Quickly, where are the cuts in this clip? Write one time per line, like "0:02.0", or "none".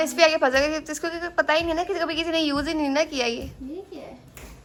none